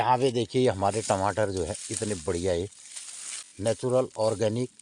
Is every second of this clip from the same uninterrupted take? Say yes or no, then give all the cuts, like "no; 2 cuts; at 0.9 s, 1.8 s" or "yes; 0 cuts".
no; 1 cut; at 3.5 s